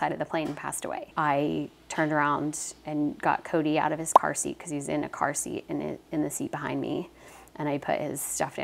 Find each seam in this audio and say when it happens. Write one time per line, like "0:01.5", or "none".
0:01.1
0:01.8